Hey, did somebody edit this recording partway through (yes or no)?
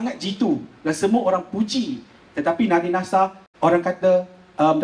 yes